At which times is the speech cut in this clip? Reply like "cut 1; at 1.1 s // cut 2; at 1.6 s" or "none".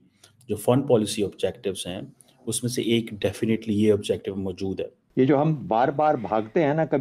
cut 1; at 4.9 s